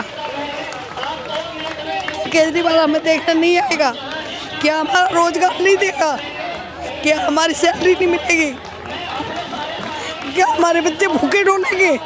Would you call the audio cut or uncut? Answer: uncut